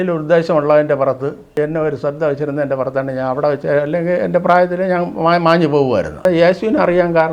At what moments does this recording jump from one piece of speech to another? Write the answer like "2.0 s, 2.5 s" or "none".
1.6 s, 6.2 s